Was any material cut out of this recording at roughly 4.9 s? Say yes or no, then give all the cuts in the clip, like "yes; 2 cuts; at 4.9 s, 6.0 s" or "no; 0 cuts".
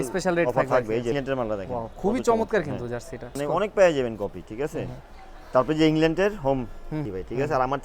no; 3 cuts; at 1.1 s, 3.4 s, 7.0 s